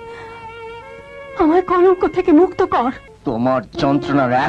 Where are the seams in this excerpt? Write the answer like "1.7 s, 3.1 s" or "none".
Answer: 3.1 s